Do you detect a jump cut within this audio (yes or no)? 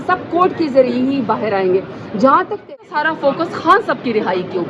yes